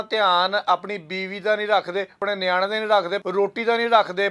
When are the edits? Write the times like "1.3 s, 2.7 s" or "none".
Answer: 2.2 s, 3.2 s